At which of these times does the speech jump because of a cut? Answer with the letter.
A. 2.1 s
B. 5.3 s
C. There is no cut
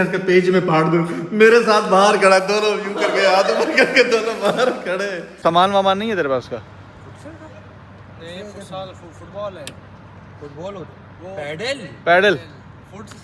B